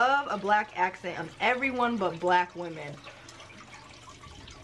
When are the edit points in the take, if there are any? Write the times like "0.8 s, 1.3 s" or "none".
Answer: none